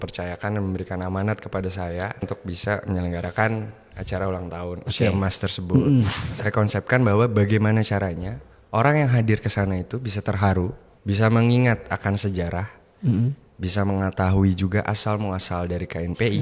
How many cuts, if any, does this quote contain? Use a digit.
3